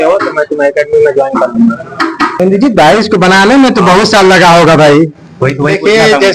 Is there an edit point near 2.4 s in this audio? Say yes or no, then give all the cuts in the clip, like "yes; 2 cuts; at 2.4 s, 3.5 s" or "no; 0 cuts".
yes; 1 cut; at 2.4 s